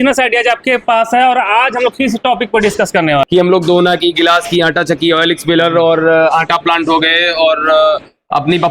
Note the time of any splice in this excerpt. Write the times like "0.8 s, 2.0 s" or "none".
3.3 s